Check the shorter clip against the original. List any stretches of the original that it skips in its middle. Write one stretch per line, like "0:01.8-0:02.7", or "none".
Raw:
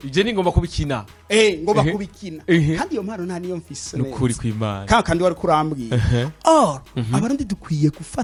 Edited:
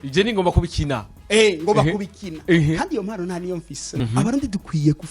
0:03.9-0:06.8